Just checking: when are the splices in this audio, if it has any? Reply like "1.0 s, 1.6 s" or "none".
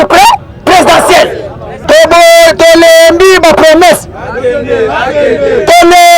1.7 s